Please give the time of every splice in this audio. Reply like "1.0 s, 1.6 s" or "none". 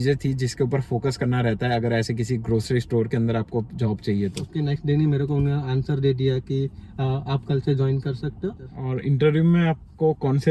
4.8 s, 8.7 s